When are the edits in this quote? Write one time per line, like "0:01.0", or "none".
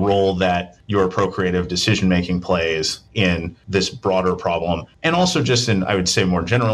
none